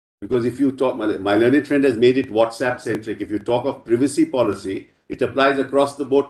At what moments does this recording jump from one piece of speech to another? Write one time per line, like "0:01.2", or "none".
none